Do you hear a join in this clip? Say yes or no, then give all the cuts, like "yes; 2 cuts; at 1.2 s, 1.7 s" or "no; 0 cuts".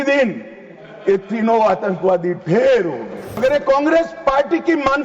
yes; 1 cut; at 3.4 s